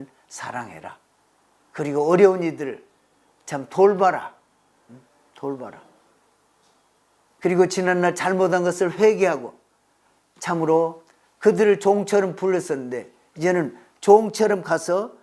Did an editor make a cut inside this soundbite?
no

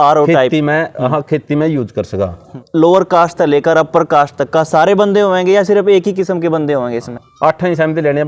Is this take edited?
yes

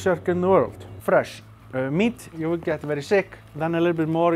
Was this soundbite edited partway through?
yes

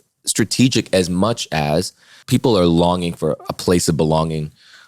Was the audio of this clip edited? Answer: yes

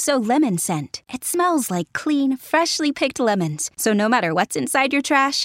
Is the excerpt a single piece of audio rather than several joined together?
yes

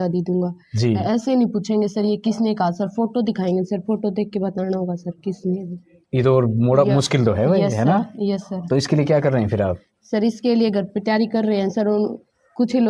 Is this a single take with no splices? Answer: yes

